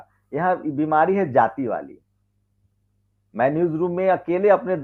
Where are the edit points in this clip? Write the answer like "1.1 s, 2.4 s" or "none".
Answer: none

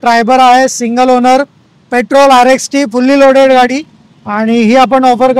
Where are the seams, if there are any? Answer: none

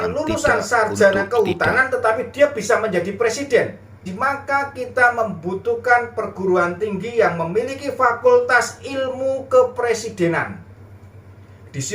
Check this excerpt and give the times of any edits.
4.1 s

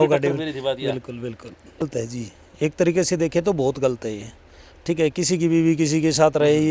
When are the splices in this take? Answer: 1.8 s

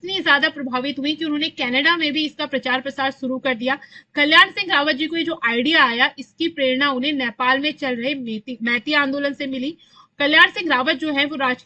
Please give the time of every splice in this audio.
none

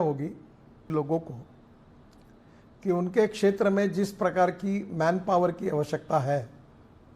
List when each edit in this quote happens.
0.9 s

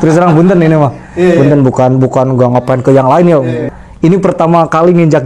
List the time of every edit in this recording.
3.7 s

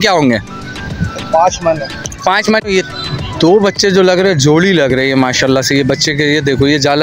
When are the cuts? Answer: 2.6 s

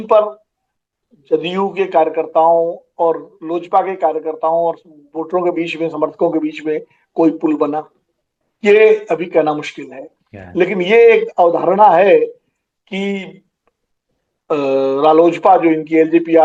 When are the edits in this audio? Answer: none

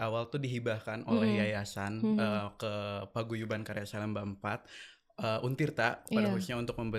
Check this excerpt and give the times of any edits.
none

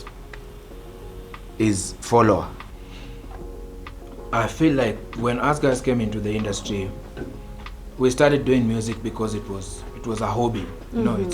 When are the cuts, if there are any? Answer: 2.6 s

